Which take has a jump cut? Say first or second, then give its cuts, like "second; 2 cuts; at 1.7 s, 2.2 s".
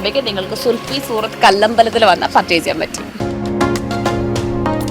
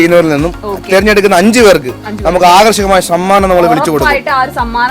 first; 1 cut; at 2.9 s